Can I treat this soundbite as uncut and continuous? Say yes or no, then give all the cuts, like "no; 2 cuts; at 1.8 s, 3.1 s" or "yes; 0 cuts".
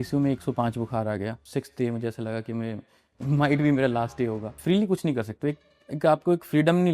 no; 2 cuts; at 1.4 s, 4.5 s